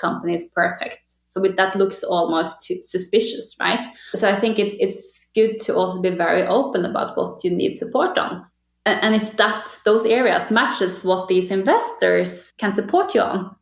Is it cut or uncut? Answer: cut